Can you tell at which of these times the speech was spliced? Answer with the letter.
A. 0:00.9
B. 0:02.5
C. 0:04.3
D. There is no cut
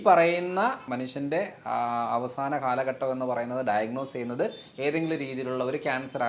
A